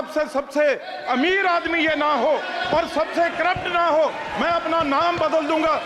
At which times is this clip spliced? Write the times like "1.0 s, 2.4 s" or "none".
none